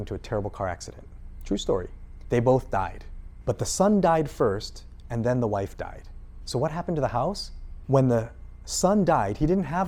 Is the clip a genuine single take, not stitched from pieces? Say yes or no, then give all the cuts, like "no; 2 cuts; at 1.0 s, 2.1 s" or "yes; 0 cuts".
yes; 0 cuts